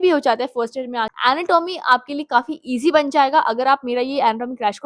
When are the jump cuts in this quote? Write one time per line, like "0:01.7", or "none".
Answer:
0:01.1